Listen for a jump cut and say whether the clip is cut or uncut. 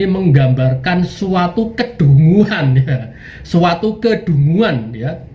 uncut